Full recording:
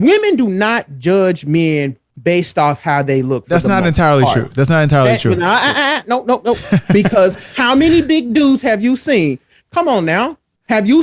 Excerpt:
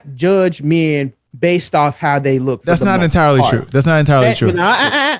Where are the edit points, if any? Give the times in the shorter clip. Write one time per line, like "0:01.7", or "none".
none